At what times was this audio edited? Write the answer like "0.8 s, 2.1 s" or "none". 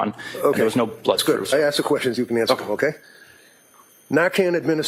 none